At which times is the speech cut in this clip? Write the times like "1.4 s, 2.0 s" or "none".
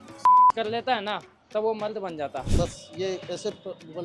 2.4 s

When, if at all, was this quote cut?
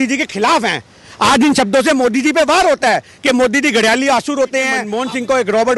4.9 s

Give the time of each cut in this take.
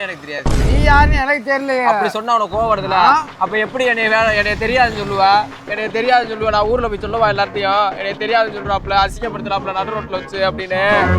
none

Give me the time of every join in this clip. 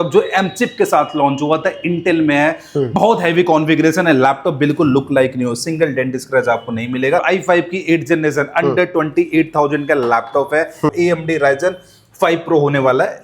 7.2 s, 10.9 s

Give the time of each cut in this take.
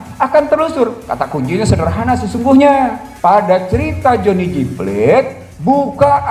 3.0 s

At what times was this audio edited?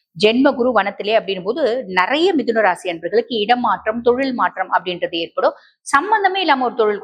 none

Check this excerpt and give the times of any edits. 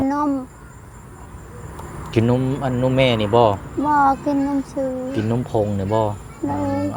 none

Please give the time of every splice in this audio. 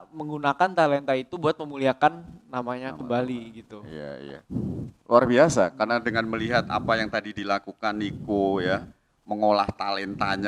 none

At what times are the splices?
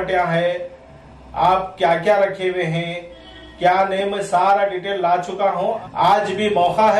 5.8 s

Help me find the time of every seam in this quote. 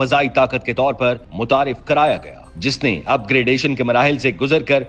none

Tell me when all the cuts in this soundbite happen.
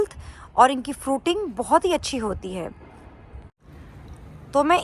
none

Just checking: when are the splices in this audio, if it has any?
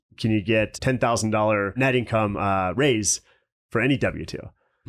0.8 s, 1.8 s

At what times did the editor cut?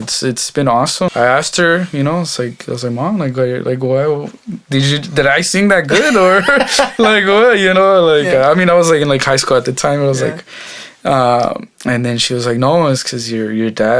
1.1 s

